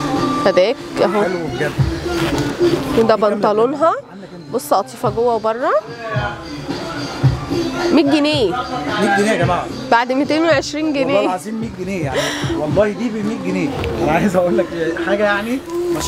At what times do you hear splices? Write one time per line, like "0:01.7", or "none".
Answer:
none